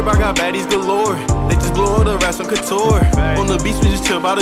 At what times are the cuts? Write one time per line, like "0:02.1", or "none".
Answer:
none